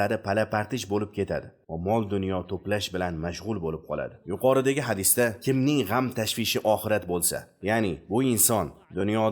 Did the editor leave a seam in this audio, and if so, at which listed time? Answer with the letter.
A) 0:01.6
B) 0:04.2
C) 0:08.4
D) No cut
D